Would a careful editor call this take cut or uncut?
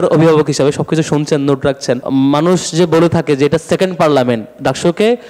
cut